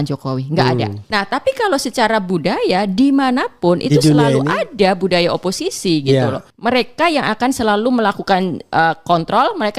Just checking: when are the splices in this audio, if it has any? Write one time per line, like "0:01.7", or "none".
0:01.0
0:06.5